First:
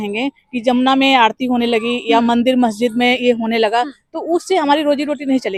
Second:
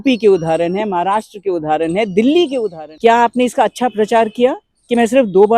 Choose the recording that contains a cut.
second; 1 cut; at 2.8 s

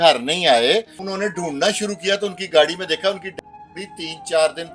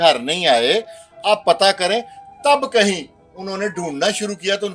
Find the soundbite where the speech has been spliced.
first; 1 cut; at 1.0 s

